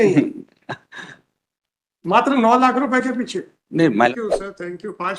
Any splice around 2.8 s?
no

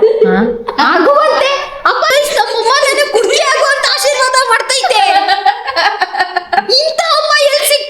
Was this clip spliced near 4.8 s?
no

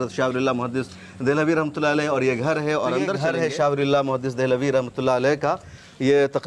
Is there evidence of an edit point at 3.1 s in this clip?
yes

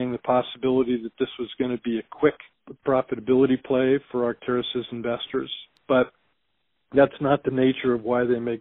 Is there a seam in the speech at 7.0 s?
no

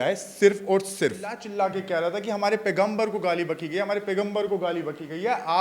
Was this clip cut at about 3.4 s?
no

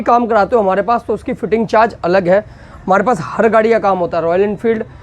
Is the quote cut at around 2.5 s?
no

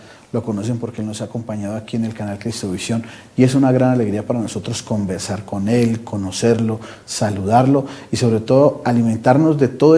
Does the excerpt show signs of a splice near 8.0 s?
yes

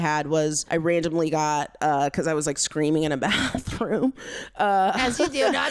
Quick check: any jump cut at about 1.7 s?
no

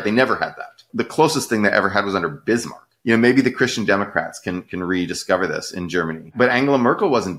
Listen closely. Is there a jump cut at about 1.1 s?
no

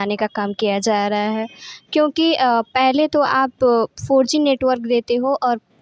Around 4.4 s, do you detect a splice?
no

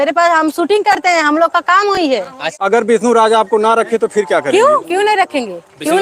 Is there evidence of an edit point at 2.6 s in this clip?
yes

